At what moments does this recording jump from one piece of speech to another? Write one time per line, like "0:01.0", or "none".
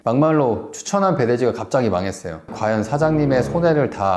0:02.5

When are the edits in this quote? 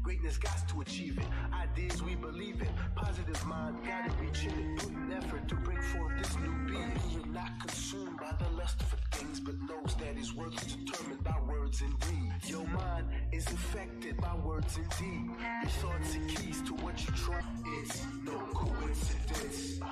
0:17.4

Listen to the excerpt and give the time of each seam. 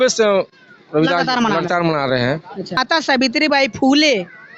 0:02.8

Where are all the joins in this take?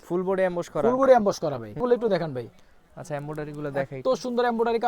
0:01.8

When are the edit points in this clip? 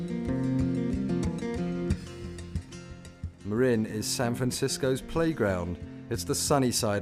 none

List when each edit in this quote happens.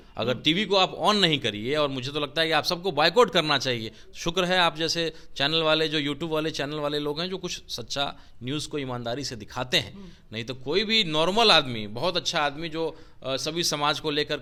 none

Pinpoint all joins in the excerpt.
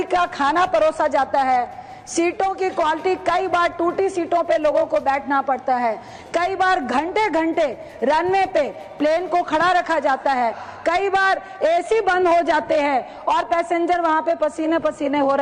none

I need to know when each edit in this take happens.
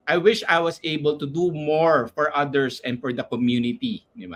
none

